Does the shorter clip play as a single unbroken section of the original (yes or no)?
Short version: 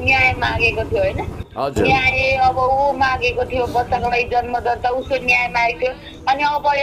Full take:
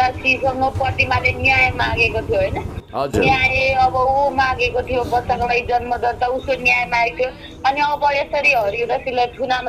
yes